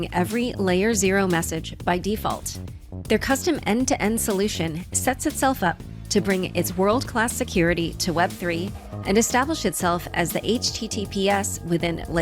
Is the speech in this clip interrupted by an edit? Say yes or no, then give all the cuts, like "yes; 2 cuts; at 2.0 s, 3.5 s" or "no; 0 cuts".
no; 0 cuts